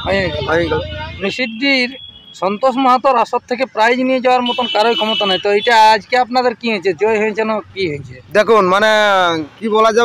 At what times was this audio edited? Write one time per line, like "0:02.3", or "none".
0:01.3